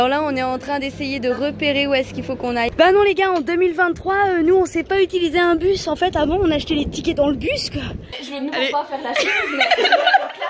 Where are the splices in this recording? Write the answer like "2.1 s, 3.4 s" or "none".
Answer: 2.7 s, 8.2 s